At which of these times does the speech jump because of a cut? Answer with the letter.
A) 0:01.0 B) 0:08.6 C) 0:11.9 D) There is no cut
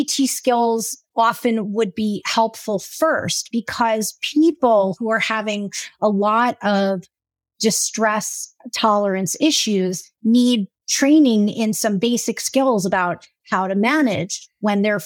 A